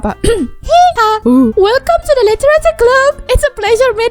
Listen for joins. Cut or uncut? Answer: cut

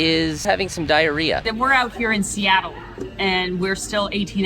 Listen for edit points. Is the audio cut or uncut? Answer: cut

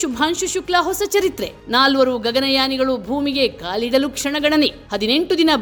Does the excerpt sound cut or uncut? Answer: uncut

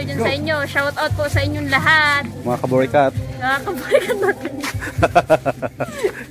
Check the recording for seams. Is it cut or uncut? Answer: uncut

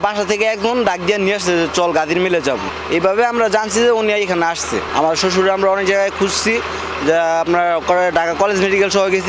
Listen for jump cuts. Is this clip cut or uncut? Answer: uncut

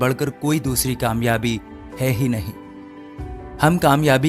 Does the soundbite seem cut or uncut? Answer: uncut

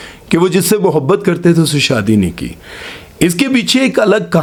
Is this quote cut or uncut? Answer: uncut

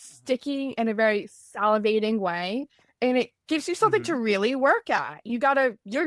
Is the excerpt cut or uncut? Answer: uncut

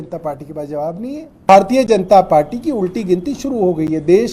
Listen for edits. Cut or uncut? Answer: cut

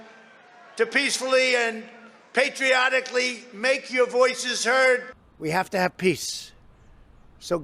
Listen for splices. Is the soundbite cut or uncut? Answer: uncut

